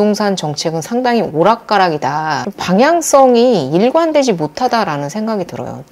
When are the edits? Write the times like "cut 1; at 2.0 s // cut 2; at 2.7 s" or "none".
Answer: none